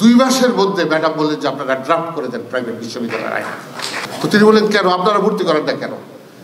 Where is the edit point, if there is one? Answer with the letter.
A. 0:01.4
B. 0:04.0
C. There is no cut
B